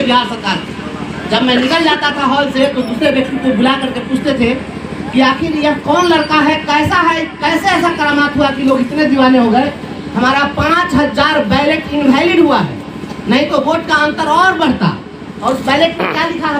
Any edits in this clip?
no; 0 cuts

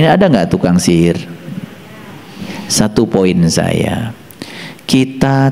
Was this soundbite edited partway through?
yes; 1 cut; at 2.6 s

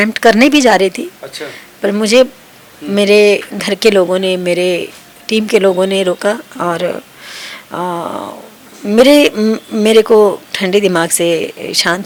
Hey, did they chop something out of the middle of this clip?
no; 0 cuts

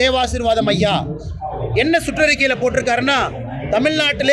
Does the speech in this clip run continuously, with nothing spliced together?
yes; 0 cuts

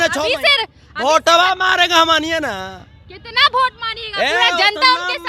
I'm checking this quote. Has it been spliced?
no; 0 cuts

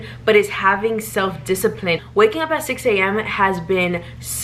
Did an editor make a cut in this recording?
yes; 1 cut; at 2.0 s

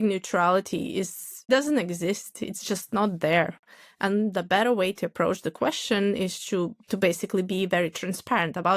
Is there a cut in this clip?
yes; 1 cut; at 1.3 s

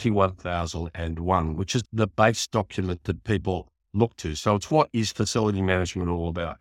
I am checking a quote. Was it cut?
yes; 1 cut; at 1.8 s

